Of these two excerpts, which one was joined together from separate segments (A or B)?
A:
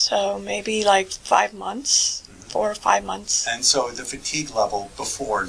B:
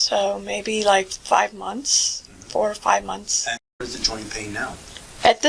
B